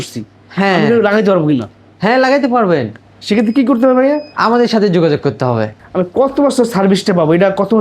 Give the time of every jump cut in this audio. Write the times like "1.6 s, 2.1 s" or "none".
5.7 s